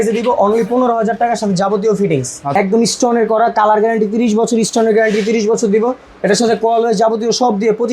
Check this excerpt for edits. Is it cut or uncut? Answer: cut